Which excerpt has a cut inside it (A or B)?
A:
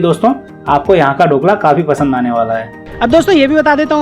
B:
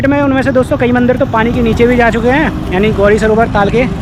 A